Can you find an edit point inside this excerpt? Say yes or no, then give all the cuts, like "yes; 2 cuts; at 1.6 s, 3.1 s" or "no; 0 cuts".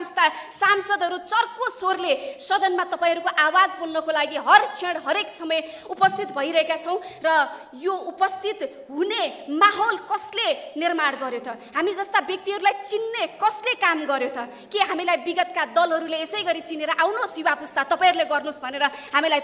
no; 0 cuts